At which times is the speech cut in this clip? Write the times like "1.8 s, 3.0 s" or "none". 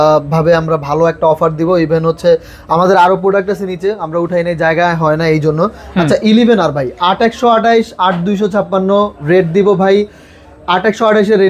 none